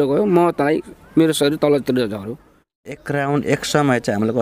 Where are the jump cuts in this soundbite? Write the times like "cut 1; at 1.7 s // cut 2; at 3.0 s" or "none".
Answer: cut 1; at 2.8 s

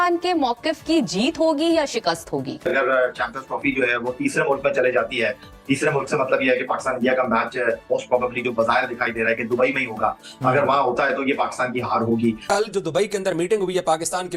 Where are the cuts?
cut 1; at 12.5 s

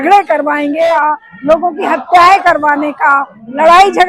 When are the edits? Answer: cut 1; at 0.9 s

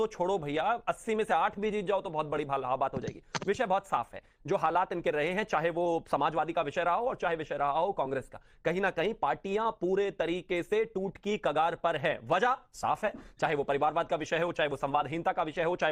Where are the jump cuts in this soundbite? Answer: none

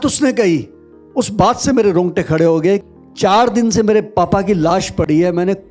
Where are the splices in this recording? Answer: cut 1; at 2.8 s

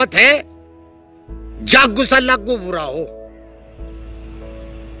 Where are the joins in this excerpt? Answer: none

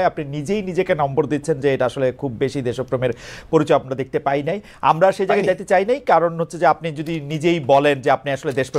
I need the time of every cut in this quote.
none

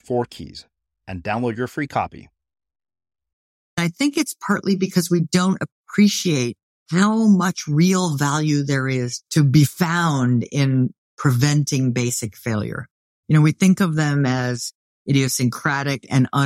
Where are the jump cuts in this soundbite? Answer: cut 1; at 3.8 s

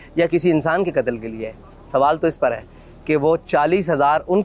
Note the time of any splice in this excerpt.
none

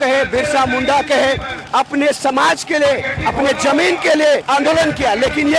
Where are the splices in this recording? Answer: cut 1; at 1.5 s // cut 2; at 4.4 s

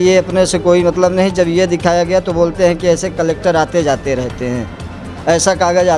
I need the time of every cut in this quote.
none

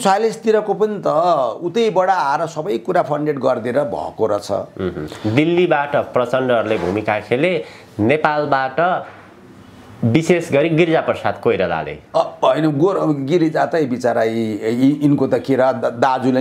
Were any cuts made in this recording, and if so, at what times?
none

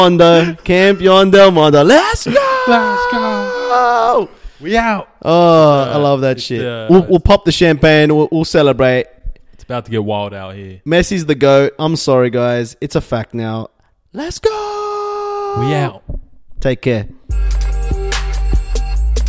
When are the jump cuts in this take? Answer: none

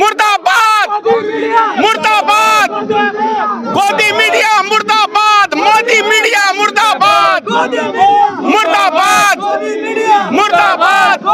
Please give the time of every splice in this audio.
none

